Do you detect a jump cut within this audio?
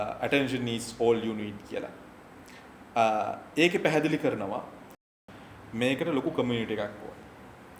yes; 1 cut; at 5.2 s

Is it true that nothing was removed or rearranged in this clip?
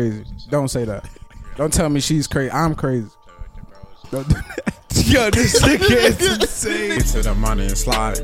no; 1 cut; at 7.0 s

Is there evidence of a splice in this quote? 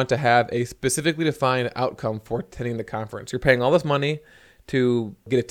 no; 0 cuts

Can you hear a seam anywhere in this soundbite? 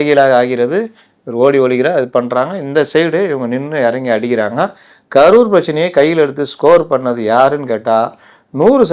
no; 0 cuts

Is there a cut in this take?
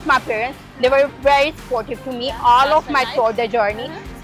no; 0 cuts

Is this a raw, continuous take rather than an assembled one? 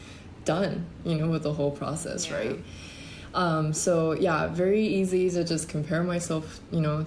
yes; 0 cuts

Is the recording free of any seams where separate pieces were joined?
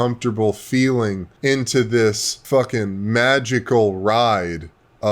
no; 2 cuts; at 1.3 s, 2.3 s

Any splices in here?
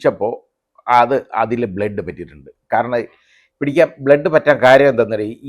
no; 0 cuts

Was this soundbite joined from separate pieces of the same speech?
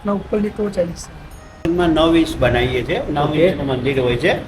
yes; 1 cut; at 1.6 s

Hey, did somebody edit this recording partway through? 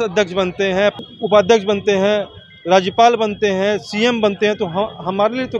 no; 0 cuts

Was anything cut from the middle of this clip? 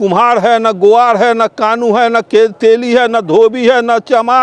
no; 0 cuts

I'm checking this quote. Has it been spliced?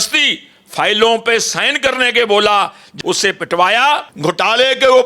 yes; 2 cuts; at 2.8 s, 4.1 s

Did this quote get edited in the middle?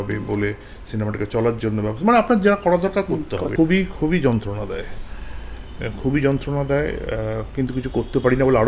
yes; 1 cut; at 3.5 s

